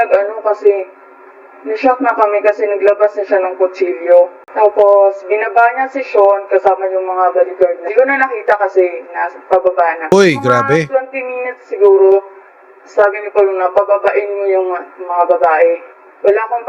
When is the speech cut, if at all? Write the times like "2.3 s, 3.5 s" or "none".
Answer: 4.4 s, 10.1 s

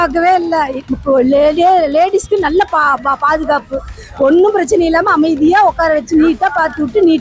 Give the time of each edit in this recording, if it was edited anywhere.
none

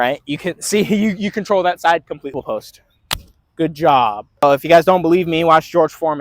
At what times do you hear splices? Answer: 2.3 s, 4.4 s

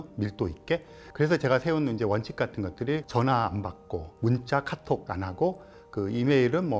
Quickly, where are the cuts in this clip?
1.0 s, 3.1 s, 4.1 s, 5.1 s

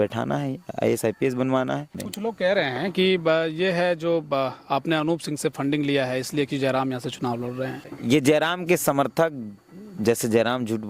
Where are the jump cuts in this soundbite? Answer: 2.1 s

